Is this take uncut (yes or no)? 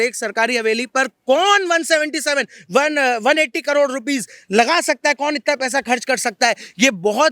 yes